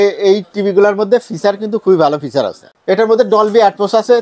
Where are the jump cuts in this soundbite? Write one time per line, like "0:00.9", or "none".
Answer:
0:02.7

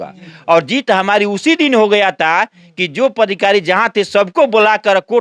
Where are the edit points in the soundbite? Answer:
none

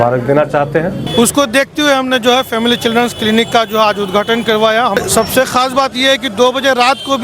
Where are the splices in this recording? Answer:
0:01.0
0:05.0

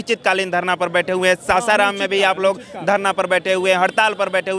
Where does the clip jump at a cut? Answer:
none

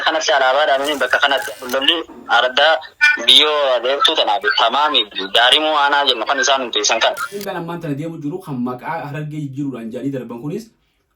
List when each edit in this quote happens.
0:01.5
0:07.4

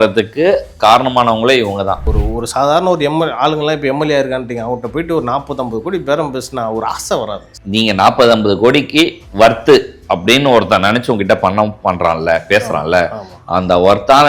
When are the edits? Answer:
0:02.1
0:07.5

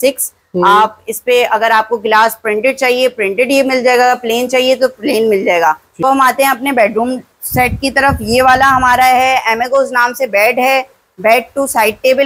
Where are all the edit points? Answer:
0:06.0

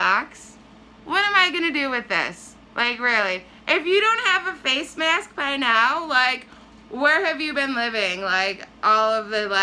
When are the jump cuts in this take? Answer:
none

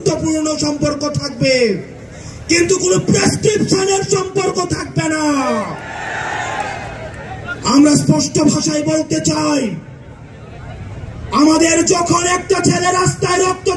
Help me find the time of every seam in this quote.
none

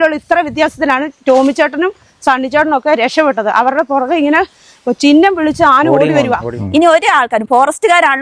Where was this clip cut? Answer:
0:06.5

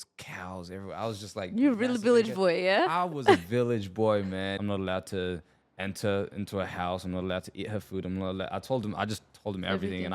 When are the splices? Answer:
0:04.5

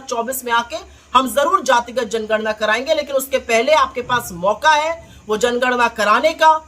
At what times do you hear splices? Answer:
none

